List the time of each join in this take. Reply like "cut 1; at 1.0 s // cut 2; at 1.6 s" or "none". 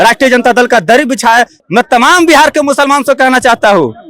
cut 1; at 1.6 s